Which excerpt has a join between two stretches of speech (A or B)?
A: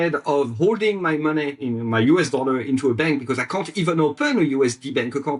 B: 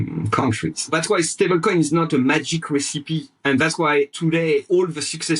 B